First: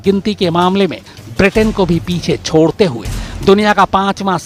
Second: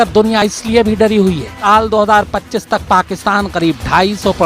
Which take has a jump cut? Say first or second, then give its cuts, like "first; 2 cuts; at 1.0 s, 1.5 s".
second; 1 cut; at 1.5 s